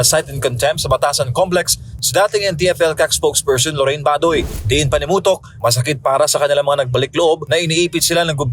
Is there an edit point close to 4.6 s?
yes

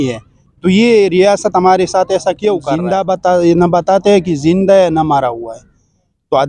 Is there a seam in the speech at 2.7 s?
yes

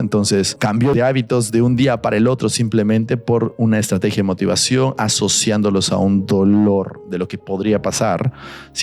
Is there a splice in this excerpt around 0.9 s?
yes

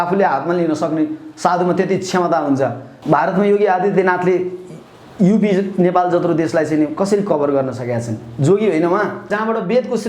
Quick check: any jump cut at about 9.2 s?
yes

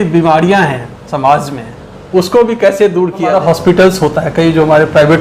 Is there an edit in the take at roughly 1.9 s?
no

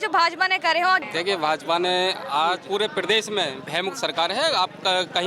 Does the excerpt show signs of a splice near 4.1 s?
no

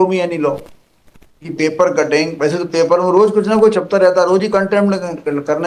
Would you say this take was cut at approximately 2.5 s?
no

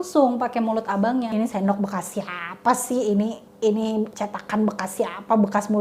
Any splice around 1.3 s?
yes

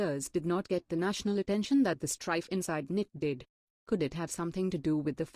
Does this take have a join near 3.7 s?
no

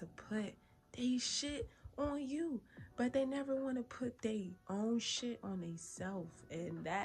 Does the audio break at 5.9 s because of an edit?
no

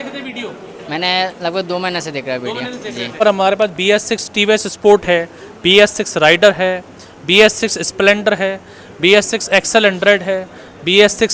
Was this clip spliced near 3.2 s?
yes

